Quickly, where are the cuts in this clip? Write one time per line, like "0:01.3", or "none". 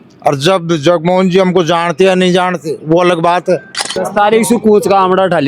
0:03.9